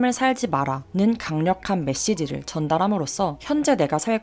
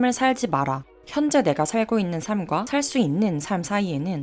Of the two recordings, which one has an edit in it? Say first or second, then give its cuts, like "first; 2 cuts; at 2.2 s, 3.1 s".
second; 1 cut; at 1.0 s